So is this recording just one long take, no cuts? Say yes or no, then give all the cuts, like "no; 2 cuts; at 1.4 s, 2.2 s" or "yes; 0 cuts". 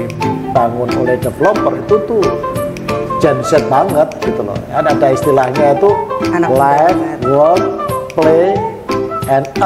yes; 0 cuts